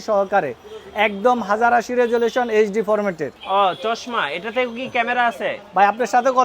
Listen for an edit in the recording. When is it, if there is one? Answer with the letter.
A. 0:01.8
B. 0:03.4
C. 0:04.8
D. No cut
B